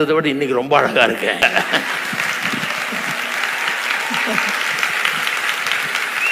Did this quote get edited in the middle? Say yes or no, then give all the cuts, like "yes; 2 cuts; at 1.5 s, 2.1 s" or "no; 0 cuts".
yes; 1 cut; at 1.4 s